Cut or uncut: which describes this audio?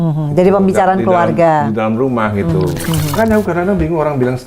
cut